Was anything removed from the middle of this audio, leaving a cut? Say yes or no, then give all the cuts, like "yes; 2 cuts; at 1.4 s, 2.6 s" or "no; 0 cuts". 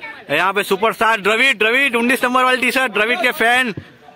no; 0 cuts